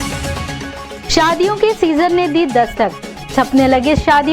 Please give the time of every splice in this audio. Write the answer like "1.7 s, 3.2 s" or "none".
1.0 s